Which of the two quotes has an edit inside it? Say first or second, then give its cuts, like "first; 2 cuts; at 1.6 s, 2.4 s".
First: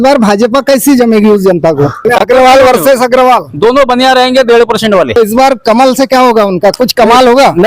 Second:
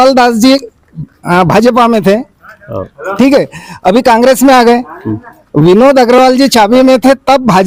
first; 2 cuts; at 2.0 s, 5.2 s